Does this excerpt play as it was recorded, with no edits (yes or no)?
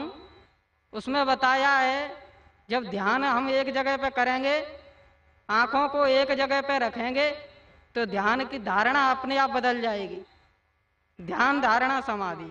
no